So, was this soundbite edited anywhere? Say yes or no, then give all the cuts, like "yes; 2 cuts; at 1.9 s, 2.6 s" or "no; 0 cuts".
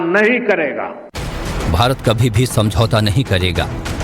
yes; 2 cuts; at 0.9 s, 2.2 s